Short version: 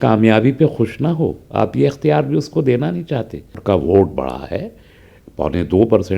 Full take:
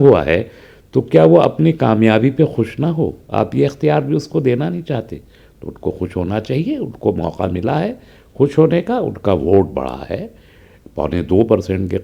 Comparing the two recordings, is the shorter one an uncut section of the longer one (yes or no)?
no